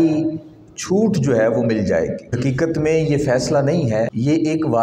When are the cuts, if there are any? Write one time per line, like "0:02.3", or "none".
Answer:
0:02.3
0:04.1